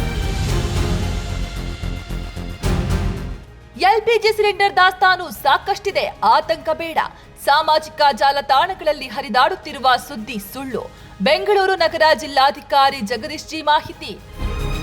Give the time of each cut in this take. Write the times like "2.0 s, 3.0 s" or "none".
3.2 s

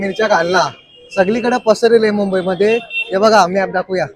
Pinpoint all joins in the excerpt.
none

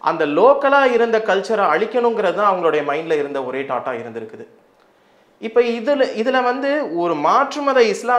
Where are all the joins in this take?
none

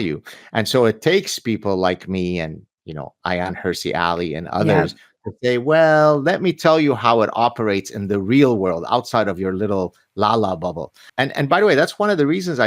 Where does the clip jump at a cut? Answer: 11.0 s

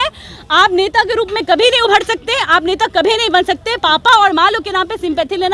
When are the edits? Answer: none

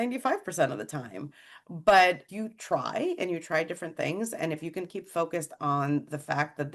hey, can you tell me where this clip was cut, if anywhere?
none

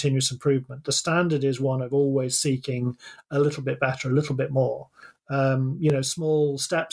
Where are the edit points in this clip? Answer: 5.0 s

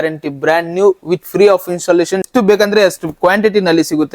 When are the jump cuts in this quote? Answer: 2.3 s

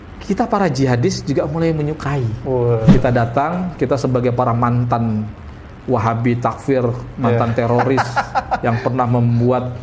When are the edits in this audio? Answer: 2.9 s

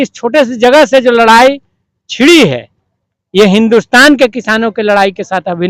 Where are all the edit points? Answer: none

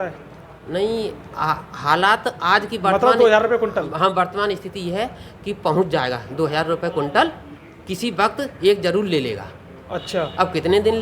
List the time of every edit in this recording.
none

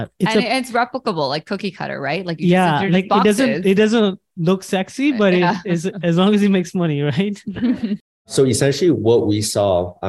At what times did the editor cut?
8.3 s

